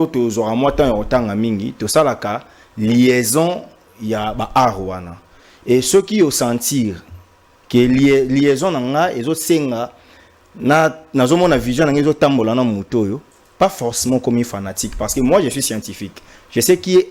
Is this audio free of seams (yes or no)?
yes